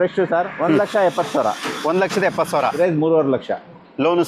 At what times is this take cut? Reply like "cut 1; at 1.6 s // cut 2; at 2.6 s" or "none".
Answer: cut 1; at 2.7 s